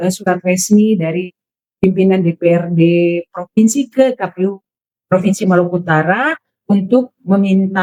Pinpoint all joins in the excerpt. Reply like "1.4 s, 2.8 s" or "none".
none